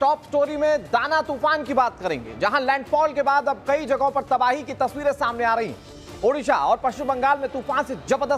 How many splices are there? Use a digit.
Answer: 0